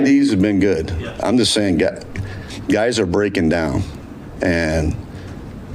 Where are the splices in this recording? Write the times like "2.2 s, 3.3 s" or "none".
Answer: 0.9 s